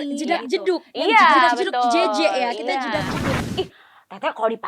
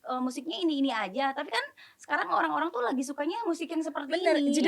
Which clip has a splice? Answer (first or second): first